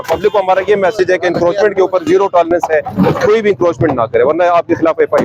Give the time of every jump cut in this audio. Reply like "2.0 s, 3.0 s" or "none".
none